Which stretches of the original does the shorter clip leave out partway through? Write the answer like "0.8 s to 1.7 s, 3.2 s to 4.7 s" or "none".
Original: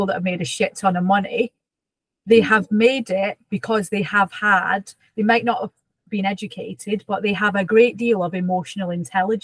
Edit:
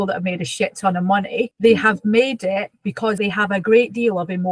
1.5 s to 2.2 s, 3.8 s to 7.2 s